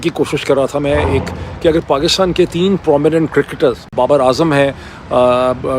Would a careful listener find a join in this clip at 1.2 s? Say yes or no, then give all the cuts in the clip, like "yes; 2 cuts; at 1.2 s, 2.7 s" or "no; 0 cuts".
no; 1 cut; at 3.9 s